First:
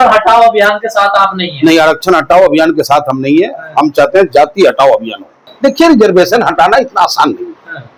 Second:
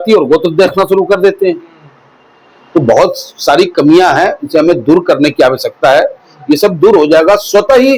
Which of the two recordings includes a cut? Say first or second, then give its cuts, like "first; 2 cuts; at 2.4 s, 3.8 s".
first; 1 cut; at 5.4 s